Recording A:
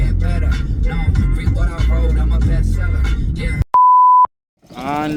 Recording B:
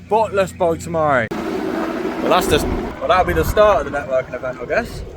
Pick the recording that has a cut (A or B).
B